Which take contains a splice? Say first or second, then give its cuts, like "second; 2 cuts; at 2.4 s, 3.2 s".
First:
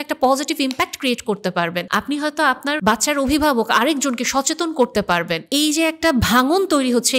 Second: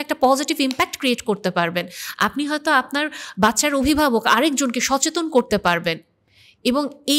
first; 3 cuts; at 1.8 s, 2.8 s, 5.4 s